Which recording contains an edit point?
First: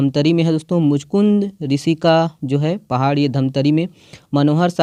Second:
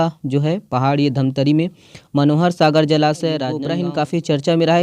second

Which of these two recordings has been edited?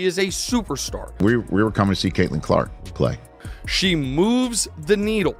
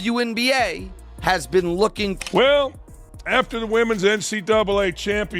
second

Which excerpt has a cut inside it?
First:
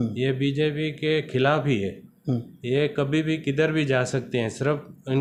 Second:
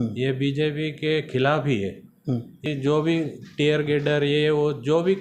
second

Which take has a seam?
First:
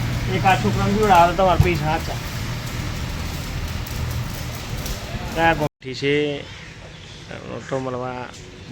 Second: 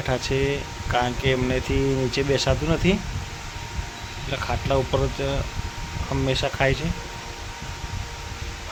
first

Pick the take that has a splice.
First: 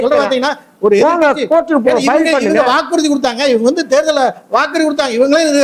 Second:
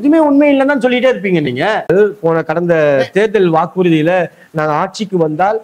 second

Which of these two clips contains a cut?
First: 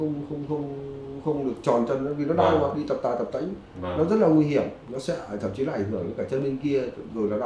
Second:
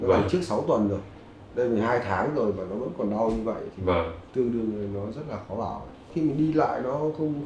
second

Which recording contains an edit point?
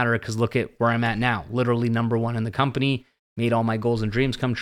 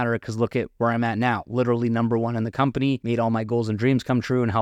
second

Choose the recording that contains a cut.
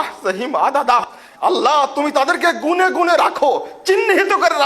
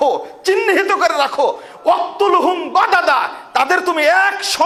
first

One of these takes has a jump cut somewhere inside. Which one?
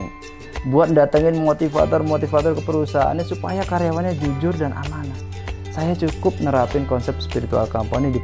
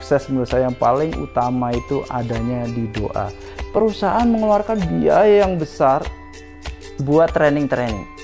second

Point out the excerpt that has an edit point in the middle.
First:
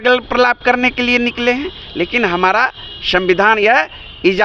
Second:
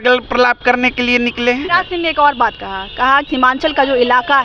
second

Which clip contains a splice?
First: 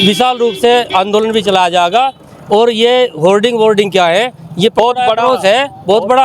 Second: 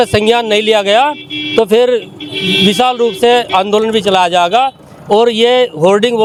first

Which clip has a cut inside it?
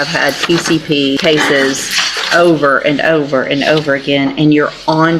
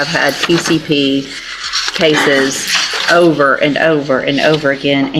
first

